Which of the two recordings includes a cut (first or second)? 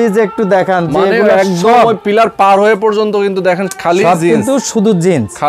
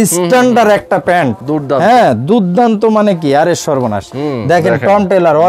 second